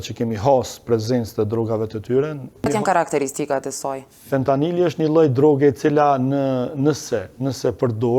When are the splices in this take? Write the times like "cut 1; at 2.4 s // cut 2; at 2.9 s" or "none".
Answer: cut 1; at 2.7 s